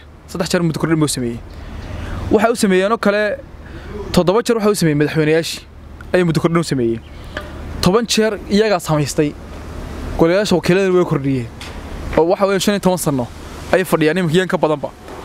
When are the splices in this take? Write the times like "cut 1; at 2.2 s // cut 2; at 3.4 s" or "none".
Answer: none